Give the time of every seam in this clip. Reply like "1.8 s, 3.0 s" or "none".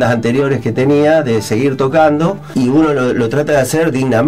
2.4 s